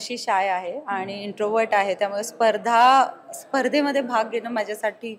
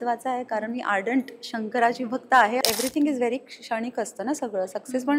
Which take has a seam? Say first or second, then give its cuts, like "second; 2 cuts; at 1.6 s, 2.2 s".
second; 1 cut; at 2.6 s